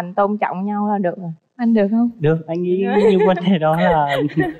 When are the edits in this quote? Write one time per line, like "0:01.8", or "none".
none